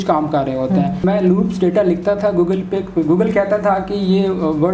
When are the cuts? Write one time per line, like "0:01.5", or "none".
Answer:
0:01.0